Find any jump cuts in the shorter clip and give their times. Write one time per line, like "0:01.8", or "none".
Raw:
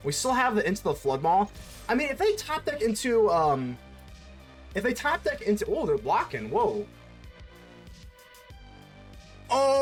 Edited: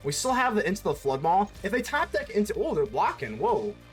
0:01.6